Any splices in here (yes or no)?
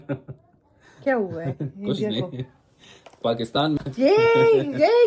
yes